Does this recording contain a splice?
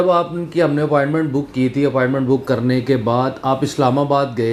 no; 0 cuts

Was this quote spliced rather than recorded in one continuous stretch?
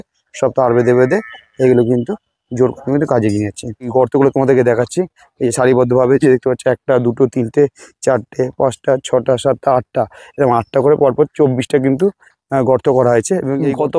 no; 0 cuts

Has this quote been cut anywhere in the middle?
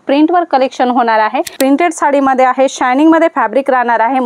yes; 1 cut; at 1.5 s

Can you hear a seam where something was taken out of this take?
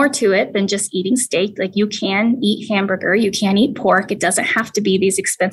no; 0 cuts

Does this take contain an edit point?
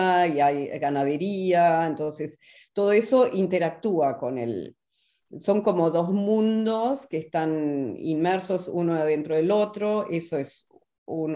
no; 0 cuts

